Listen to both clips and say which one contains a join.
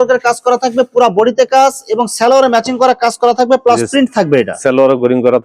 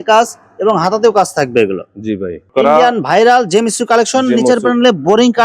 second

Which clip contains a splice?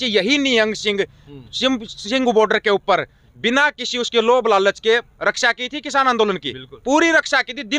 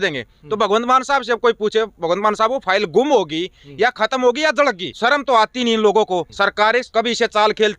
second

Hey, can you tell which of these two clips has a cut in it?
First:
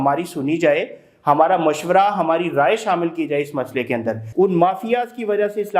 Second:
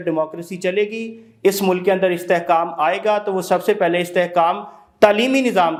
first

